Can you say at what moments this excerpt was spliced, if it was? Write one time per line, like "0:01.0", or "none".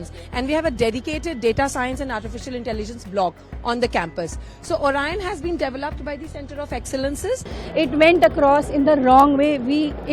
0:07.5